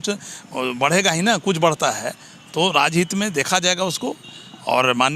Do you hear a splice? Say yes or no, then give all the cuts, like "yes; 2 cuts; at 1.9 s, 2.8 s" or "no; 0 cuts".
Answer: no; 0 cuts